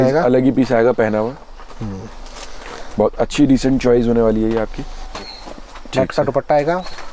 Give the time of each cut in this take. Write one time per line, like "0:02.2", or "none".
none